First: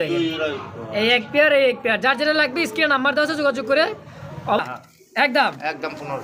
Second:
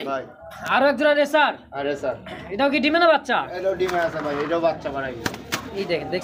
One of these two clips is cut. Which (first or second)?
first